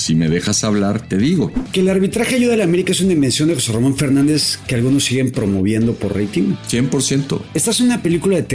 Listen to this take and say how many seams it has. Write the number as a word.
three